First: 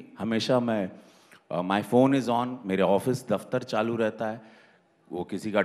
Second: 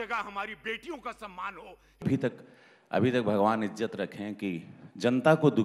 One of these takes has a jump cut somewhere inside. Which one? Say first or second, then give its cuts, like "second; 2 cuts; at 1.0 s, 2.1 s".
second; 1 cut; at 2.2 s